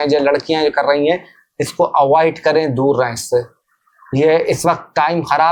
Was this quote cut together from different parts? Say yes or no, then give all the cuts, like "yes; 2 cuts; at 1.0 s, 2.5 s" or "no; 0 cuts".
no; 0 cuts